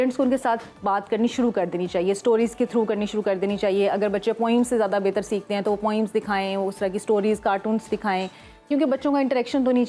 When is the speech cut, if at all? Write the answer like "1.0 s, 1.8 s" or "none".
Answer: none